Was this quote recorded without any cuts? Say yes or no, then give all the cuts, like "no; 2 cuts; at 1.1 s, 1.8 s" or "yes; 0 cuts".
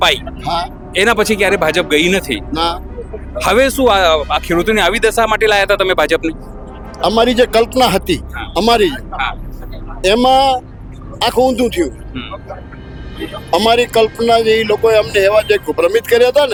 yes; 0 cuts